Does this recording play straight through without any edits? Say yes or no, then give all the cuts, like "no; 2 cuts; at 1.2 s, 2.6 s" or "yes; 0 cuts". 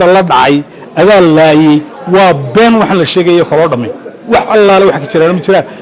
yes; 0 cuts